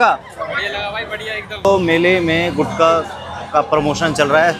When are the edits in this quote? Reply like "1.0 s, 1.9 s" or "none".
1.7 s

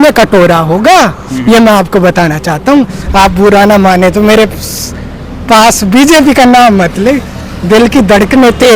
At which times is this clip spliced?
3.0 s

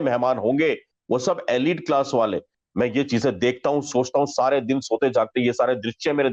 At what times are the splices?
2.5 s

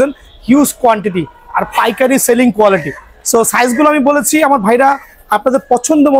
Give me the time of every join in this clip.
none

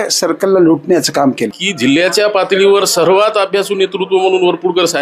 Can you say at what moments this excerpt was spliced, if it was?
1.6 s

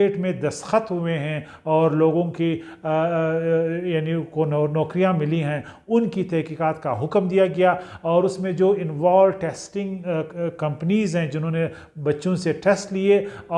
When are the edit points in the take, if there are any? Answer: none

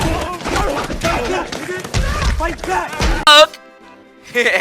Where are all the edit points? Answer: 3.3 s

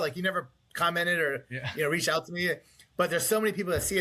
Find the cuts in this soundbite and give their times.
none

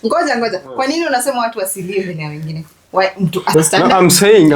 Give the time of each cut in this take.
3.5 s

